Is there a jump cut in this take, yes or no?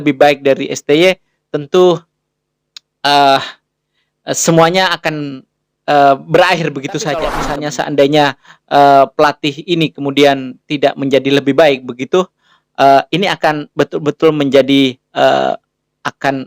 yes